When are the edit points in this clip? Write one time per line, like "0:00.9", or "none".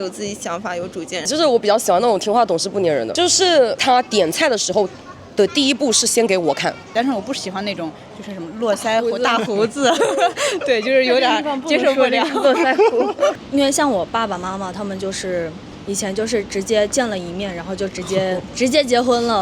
0:01.3
0:03.8
0:06.9
0:13.4
0:18.5